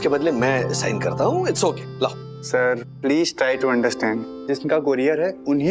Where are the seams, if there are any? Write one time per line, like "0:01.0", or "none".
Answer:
0:04.3